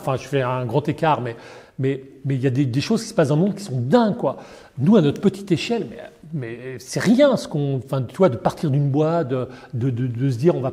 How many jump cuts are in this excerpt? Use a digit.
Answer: 0